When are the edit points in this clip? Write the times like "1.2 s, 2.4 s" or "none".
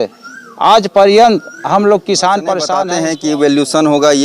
2.8 s